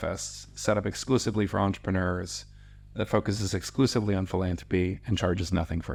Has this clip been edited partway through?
no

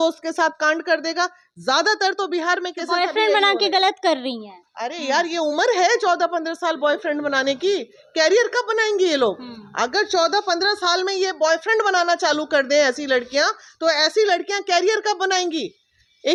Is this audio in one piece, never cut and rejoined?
yes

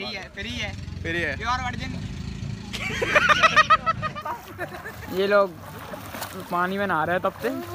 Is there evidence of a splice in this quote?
yes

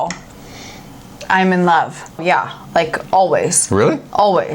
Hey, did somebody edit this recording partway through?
yes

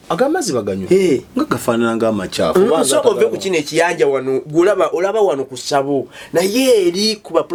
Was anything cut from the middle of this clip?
no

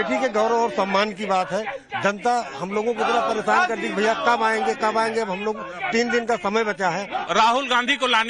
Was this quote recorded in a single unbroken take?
yes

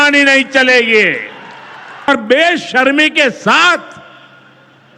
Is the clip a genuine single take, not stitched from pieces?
no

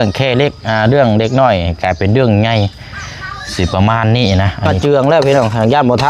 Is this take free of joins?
no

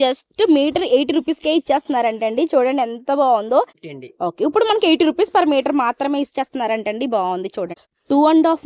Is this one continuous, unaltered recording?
no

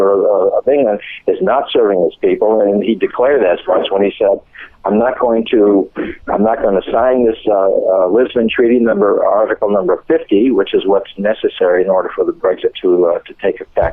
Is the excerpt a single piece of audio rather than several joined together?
yes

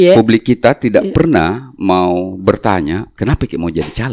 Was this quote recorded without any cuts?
no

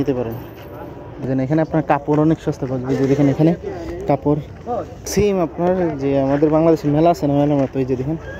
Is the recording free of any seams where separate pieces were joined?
no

